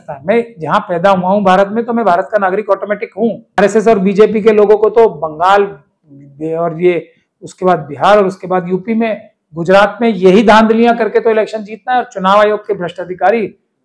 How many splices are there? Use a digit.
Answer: 1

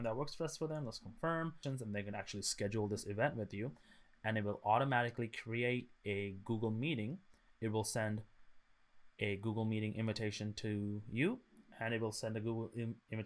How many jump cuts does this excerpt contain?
1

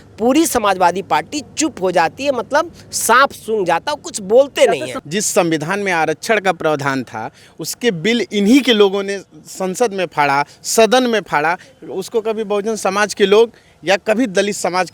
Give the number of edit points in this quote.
1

